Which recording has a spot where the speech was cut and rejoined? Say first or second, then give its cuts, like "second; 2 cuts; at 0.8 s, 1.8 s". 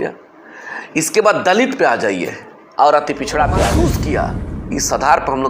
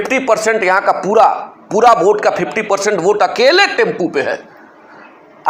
first; 1 cut; at 3.7 s